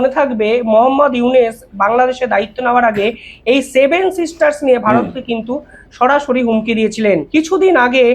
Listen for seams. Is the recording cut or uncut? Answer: cut